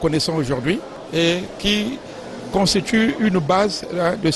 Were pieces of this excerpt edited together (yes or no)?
yes